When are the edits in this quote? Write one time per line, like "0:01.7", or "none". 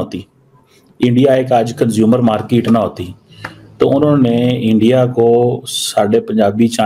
none